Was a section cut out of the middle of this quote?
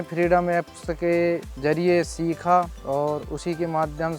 yes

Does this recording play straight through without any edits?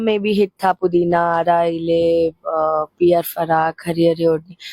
yes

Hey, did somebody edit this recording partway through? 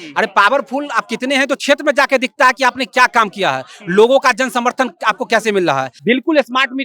yes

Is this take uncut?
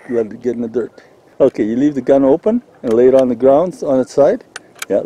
no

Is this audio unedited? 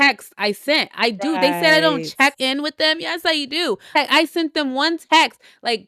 yes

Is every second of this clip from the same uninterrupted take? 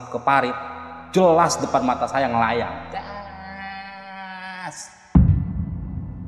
no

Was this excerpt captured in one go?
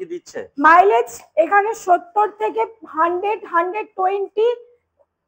yes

